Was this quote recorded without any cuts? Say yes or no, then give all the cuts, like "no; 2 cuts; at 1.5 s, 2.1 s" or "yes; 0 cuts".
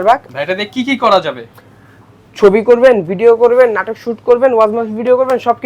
yes; 0 cuts